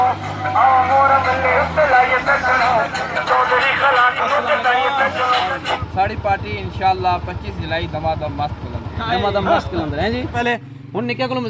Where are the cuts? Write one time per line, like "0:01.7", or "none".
0:05.8
0:10.4